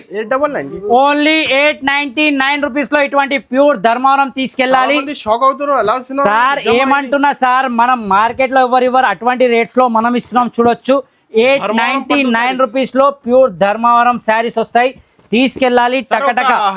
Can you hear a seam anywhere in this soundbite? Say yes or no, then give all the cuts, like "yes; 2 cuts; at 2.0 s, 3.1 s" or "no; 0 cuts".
no; 0 cuts